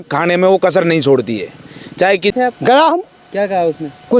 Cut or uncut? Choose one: cut